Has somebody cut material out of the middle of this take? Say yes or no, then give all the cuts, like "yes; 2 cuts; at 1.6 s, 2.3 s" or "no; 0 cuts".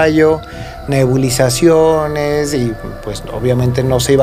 no; 0 cuts